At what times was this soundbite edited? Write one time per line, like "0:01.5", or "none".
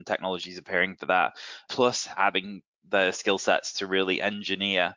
0:01.6